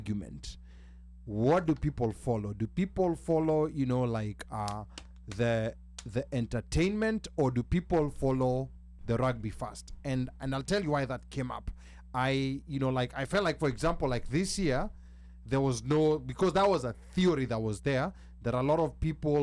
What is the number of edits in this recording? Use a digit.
0